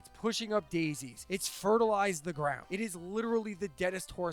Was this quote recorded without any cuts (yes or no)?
no